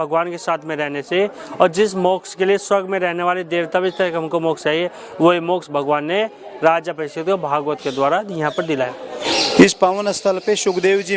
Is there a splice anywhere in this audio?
yes; 1 cut; at 9.2 s

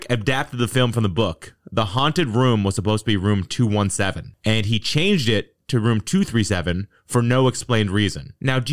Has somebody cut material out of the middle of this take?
no; 0 cuts

